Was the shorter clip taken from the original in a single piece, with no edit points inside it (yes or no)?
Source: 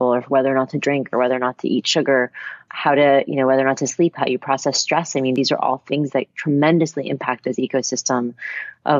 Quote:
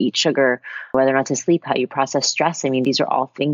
no